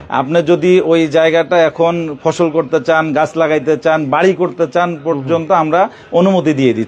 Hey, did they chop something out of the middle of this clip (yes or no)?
no